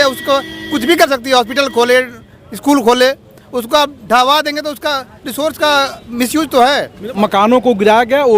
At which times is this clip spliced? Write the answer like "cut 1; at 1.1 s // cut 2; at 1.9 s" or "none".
cut 1; at 7.0 s

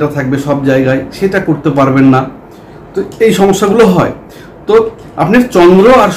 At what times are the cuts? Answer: none

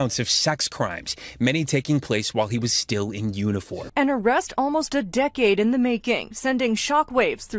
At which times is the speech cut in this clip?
none

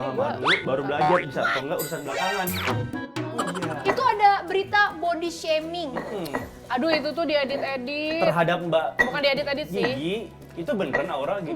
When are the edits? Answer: cut 1; at 3.7 s

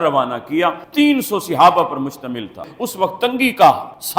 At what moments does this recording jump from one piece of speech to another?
cut 1; at 2.6 s

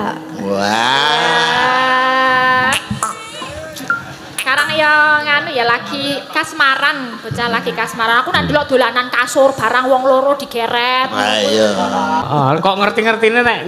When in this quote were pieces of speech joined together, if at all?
cut 1; at 12.3 s

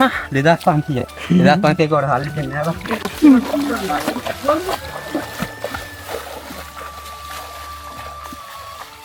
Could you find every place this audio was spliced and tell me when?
none

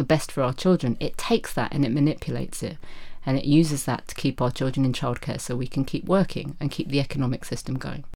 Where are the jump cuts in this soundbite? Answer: none

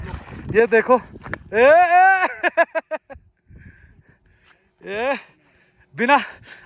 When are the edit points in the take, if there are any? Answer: none

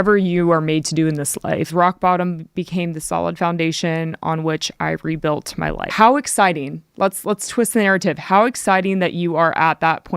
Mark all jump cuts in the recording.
cut 1; at 1.7 s // cut 2; at 5.8 s

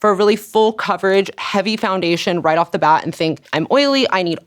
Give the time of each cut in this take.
cut 1; at 3.4 s

